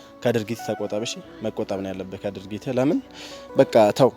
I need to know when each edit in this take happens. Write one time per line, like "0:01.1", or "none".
none